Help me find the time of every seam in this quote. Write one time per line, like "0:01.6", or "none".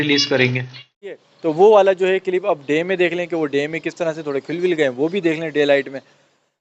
0:01.3

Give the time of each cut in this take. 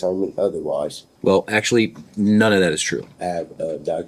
0:01.0
0:03.1

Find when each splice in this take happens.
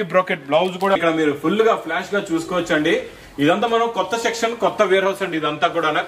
0:01.0

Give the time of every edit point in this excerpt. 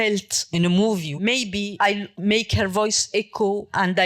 0:01.5

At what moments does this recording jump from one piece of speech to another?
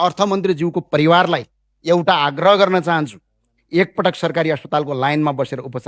none

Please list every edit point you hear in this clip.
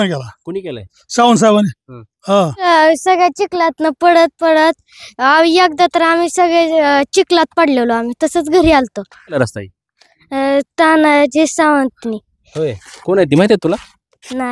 0:02.7
0:09.4

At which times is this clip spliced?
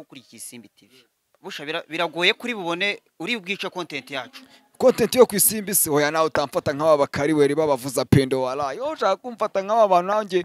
0:01.4

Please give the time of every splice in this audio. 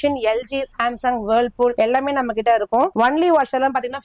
0:01.7
0:02.9

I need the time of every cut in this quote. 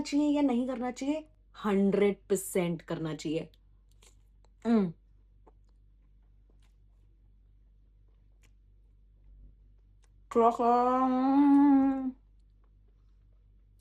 none

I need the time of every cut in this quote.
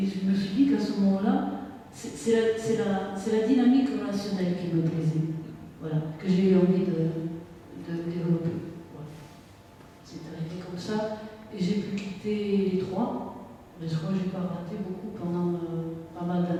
none

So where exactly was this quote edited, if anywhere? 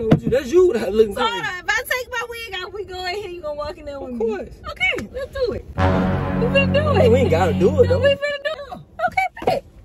0:08.5

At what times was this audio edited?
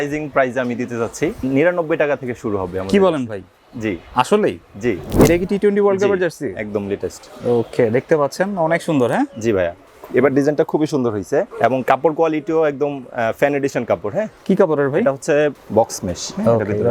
0:01.4
0:05.1
0:15.6

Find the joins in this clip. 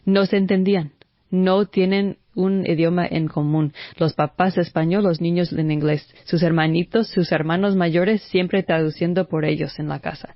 none

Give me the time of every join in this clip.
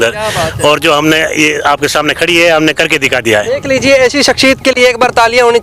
0:03.6

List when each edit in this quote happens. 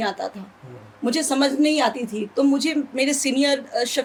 none

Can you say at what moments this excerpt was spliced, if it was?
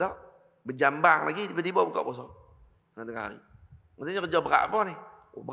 none

